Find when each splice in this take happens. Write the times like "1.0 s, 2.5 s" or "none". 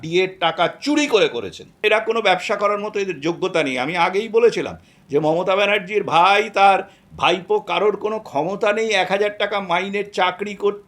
1.8 s